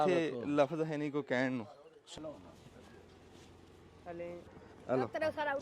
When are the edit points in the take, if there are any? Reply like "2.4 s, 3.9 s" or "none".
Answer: 2.2 s, 4.5 s